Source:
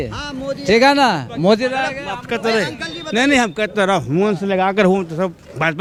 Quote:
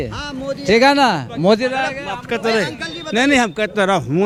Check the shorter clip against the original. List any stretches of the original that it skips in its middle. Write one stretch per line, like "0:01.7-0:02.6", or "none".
none